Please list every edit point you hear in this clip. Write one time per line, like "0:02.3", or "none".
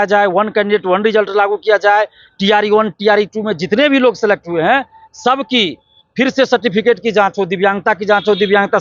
none